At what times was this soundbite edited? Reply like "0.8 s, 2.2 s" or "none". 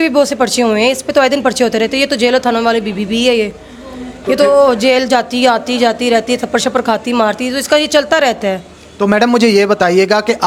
none